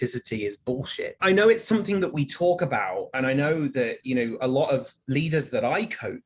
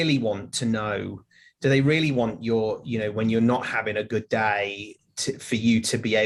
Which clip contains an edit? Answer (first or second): first